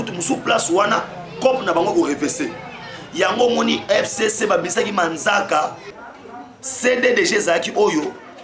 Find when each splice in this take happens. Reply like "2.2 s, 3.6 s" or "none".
5.8 s